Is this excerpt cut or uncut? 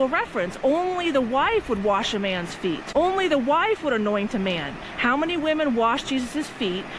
cut